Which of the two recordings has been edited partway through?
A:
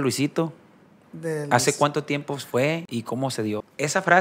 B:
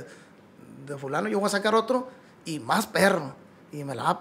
A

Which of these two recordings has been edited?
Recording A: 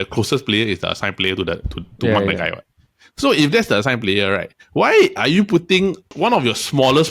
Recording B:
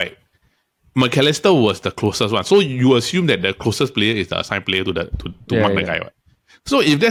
A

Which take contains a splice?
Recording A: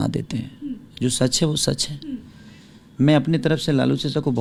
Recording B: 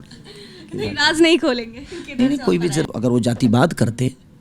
B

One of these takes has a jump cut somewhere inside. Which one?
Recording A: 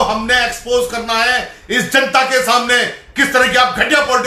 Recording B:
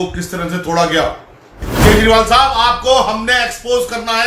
B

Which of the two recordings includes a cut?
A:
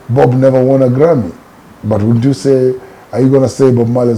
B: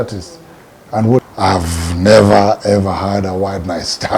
B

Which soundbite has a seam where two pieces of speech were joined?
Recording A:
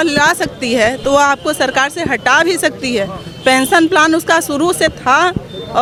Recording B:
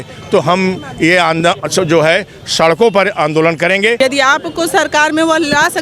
B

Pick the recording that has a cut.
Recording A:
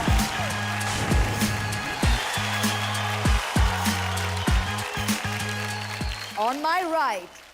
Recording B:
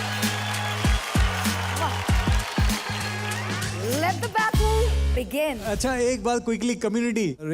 B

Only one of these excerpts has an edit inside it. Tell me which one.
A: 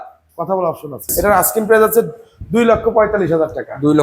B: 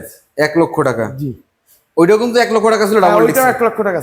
A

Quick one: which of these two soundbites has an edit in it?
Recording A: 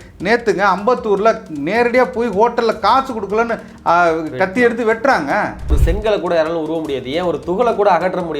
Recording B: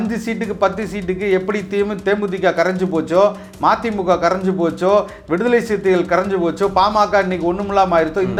A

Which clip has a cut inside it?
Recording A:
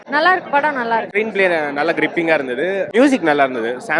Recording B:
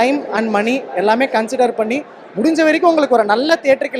A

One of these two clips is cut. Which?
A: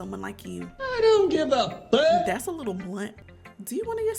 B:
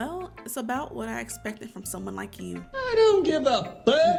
A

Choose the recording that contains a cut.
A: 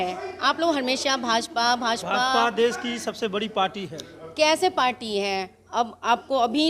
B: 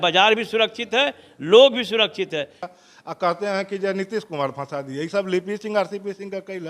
B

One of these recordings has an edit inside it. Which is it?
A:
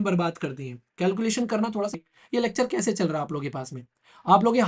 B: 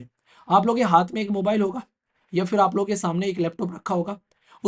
A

